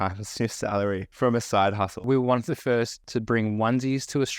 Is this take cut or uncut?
cut